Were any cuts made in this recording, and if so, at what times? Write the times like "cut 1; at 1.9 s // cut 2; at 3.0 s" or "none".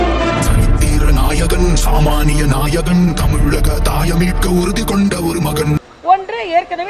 cut 1; at 5.9 s